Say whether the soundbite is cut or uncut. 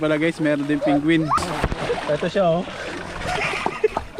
cut